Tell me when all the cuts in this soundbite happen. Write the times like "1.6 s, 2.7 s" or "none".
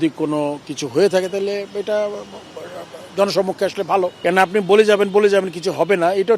4.2 s